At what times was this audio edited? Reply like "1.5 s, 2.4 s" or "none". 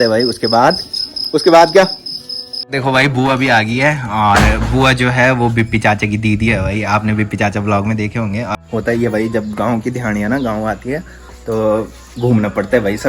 2.7 s, 8.5 s